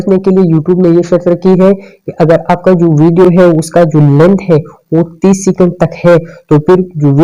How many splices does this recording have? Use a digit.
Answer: 0